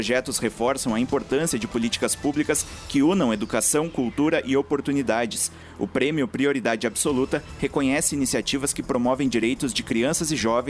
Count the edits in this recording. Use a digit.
0